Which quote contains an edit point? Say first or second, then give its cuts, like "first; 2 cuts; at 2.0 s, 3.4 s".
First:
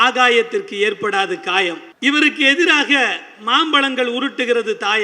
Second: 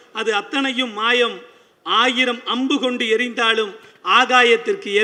first; 1 cut; at 1.9 s